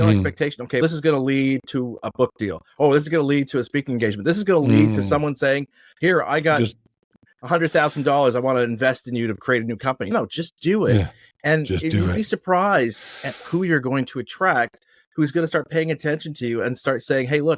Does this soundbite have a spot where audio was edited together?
no; 0 cuts

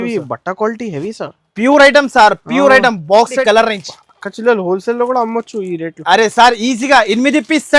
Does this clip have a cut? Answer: yes; 1 cut; at 3.4 s

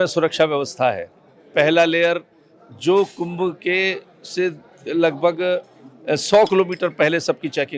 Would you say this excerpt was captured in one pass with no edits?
yes; 0 cuts

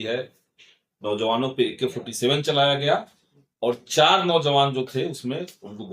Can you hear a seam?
no; 0 cuts

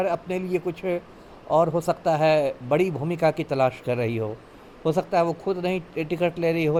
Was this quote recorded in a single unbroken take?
yes; 0 cuts

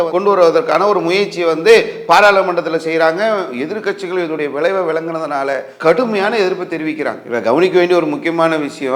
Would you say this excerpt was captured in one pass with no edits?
yes; 0 cuts

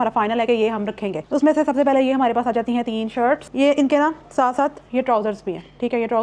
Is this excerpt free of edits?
yes; 0 cuts

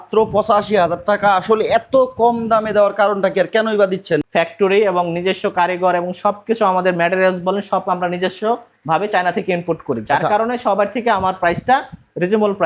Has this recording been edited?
no; 0 cuts

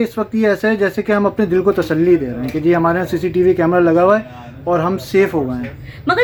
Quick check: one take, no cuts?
yes; 0 cuts

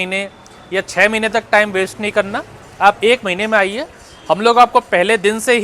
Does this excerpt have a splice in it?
no; 0 cuts

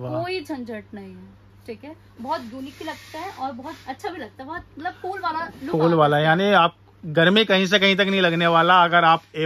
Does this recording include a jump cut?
no; 0 cuts

